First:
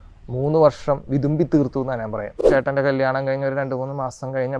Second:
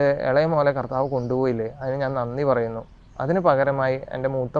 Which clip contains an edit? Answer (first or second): first